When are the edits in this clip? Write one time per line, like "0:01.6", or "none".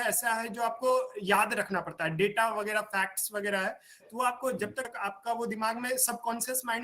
0:04.8